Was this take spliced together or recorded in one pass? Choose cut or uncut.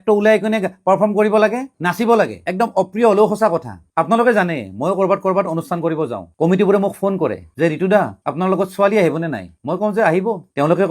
cut